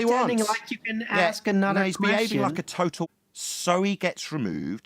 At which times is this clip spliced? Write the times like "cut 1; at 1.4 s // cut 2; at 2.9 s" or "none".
cut 1; at 3.1 s